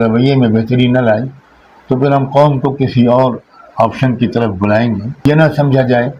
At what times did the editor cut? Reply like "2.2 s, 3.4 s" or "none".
5.1 s